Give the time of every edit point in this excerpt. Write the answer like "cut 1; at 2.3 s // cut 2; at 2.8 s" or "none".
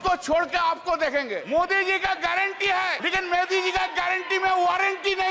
cut 1; at 1.4 s // cut 2; at 3.0 s